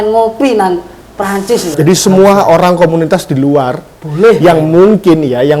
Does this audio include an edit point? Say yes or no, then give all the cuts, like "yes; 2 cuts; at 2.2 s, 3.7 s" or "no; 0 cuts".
yes; 1 cut; at 1.7 s